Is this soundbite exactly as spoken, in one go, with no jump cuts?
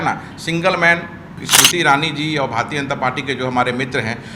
no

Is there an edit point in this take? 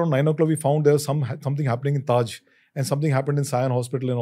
no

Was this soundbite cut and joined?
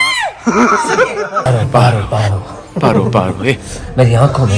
yes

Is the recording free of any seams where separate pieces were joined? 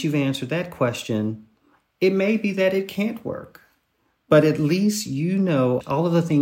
yes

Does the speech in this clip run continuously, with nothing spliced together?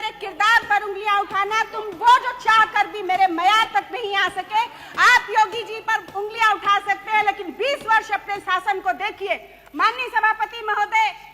yes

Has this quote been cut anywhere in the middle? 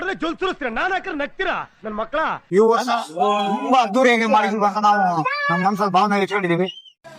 yes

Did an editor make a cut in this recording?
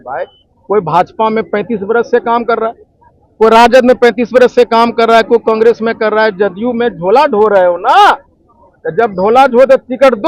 no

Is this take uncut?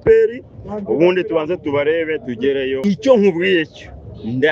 no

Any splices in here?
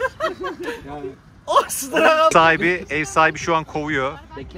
yes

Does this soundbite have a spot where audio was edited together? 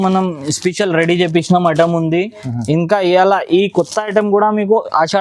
no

